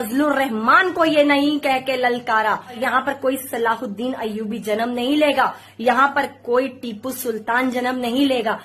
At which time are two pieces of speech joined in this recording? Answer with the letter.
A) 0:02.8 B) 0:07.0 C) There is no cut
A